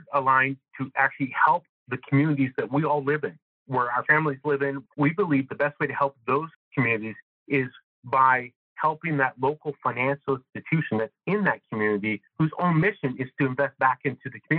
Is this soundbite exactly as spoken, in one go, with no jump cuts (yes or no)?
no